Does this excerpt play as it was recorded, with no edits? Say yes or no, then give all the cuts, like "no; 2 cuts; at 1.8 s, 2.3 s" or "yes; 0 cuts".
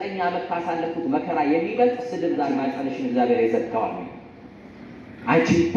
no; 1 cut; at 2.7 s